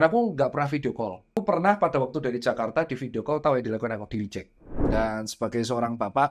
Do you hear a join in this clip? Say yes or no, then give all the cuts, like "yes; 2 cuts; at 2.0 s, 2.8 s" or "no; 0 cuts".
yes; 2 cuts; at 1.3 s, 4.7 s